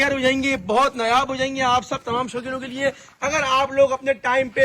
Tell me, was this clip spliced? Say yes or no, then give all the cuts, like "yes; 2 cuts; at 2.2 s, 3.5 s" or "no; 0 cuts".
no; 0 cuts